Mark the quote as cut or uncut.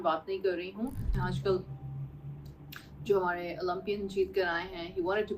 cut